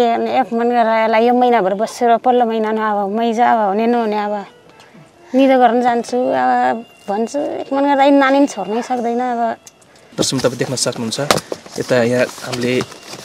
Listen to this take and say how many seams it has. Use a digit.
1